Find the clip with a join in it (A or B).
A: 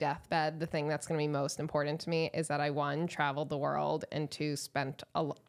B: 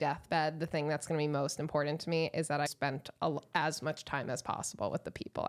B